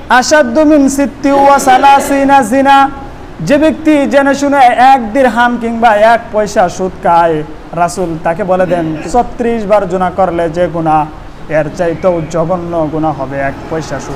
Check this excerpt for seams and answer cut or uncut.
cut